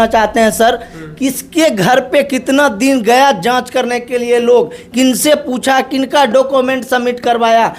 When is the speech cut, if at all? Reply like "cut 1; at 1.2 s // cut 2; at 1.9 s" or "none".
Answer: none